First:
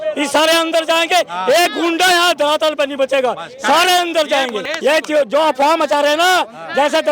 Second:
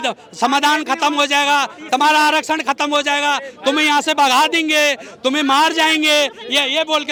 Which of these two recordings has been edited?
first; 1 cut; at 4.6 s

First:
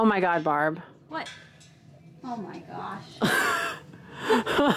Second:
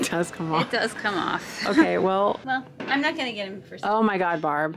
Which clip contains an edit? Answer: second; 1 cut; at 2.4 s

